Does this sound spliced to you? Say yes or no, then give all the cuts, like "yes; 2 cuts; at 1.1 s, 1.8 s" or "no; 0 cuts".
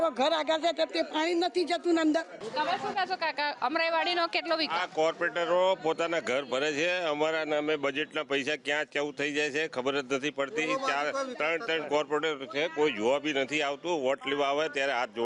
no; 0 cuts